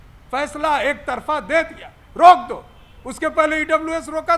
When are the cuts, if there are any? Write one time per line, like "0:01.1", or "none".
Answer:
none